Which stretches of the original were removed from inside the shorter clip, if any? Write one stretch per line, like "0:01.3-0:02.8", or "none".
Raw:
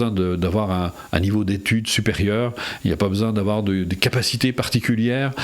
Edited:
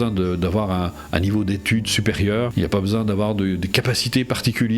0:02.5-0:02.8